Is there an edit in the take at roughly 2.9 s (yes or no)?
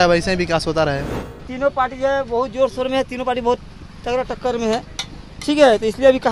no